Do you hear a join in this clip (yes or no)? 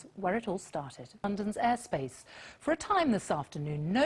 yes